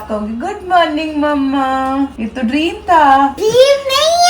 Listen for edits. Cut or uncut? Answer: cut